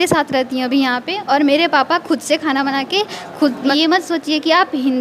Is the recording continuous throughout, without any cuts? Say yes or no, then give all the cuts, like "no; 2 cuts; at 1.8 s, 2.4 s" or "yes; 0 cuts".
no; 1 cut; at 3.7 s